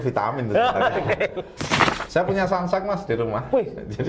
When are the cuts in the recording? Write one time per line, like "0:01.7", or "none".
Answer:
0:01.8